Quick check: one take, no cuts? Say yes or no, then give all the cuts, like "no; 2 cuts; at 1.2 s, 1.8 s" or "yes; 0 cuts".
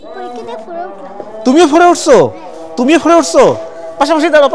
yes; 0 cuts